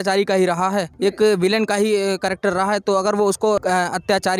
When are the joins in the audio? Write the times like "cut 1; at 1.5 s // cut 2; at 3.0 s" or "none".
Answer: cut 1; at 0.9 s // cut 2; at 3.6 s